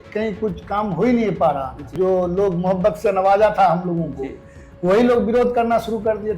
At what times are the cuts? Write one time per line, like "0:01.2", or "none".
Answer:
0:01.9